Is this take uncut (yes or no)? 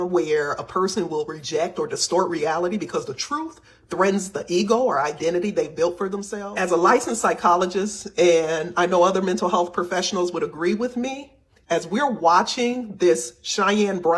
yes